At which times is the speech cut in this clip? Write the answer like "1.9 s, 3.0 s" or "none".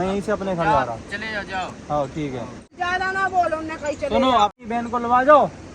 2.8 s, 4.6 s